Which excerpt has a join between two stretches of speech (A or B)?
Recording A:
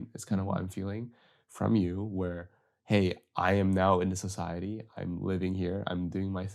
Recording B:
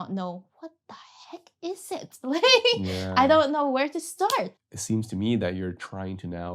B